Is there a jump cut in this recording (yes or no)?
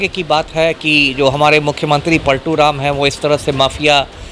no